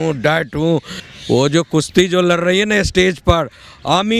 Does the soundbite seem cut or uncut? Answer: cut